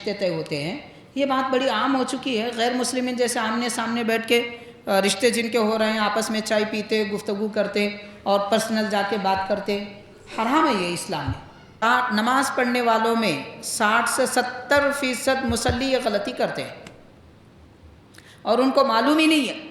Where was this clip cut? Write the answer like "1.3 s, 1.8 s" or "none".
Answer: 11.8 s